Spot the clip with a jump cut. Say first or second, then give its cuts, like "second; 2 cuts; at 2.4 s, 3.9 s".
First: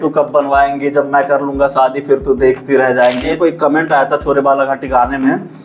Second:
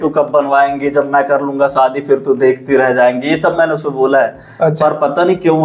first; 1 cut; at 3.3 s